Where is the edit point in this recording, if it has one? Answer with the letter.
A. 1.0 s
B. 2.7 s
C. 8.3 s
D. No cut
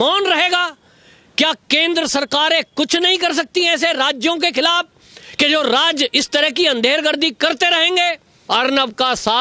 C